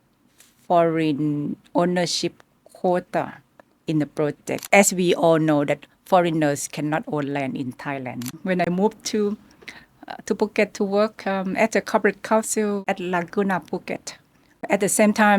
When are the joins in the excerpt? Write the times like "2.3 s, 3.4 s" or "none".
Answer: 4.5 s, 8.3 s, 14.7 s